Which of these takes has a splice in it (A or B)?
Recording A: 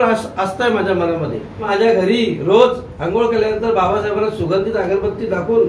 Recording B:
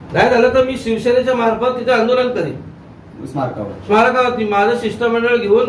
A